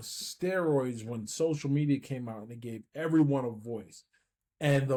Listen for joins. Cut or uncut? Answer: uncut